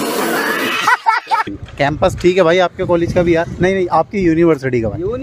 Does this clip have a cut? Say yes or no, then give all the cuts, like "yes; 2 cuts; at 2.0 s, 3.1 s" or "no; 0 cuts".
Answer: yes; 1 cut; at 1.5 s